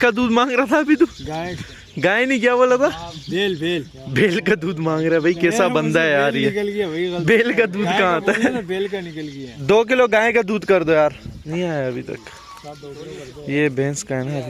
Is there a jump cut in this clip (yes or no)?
no